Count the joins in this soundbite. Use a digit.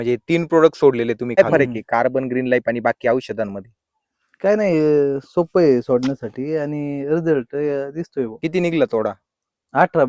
2